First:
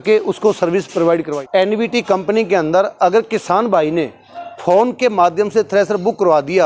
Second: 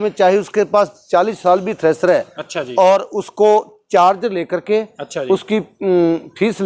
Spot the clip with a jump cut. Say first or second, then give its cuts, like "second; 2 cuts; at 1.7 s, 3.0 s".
first; 1 cut; at 1.4 s